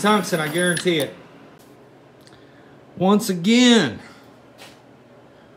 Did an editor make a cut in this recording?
yes; 1 cut; at 1.6 s

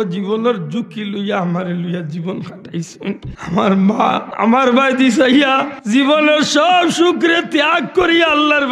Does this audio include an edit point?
yes; 3 cuts; at 3.3 s, 4.3 s, 5.7 s

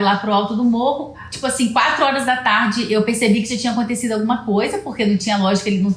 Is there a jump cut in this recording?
yes; 1 cut; at 1.2 s

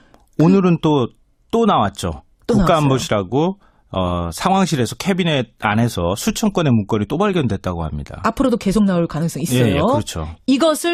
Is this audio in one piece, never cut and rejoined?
yes; 0 cuts

